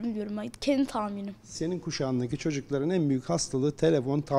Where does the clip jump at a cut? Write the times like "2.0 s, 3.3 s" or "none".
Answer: 1.5 s